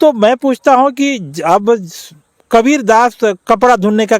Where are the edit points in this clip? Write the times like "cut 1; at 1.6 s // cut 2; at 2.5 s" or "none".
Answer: none